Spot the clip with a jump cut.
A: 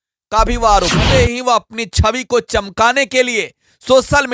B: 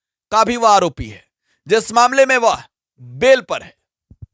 A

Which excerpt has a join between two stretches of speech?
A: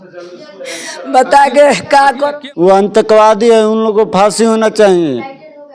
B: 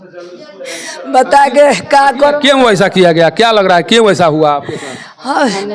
A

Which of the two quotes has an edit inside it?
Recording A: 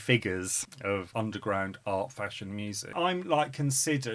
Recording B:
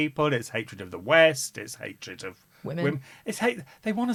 A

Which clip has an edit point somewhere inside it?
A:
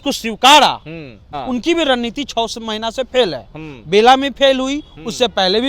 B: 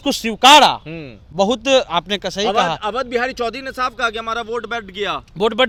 A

